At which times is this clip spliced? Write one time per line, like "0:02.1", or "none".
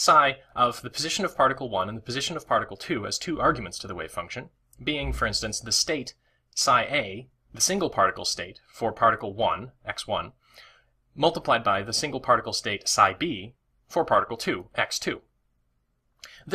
0:05.6

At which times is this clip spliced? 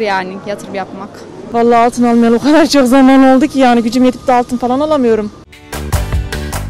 0:01.4
0:05.5

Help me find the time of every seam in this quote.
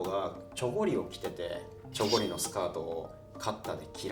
0:01.8

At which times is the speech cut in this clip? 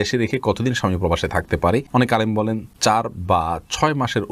0:01.9
0:02.7

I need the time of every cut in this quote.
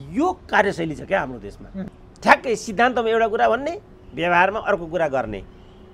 0:02.0

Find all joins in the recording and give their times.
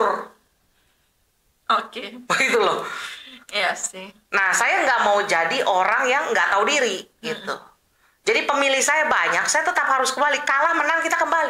none

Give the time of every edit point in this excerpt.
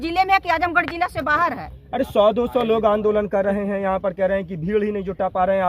none

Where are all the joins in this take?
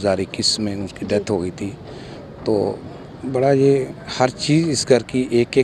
none

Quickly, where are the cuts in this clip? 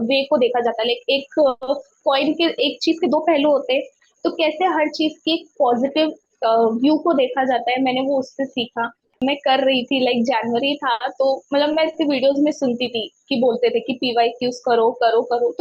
0:09.2

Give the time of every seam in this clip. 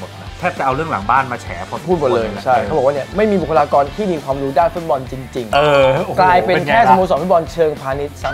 none

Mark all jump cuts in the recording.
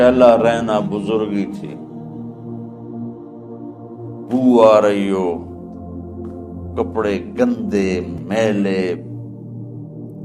0:01.6
0:04.3
0:05.4
0:06.8
0:09.1

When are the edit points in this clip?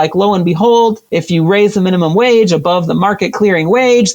0:01.1

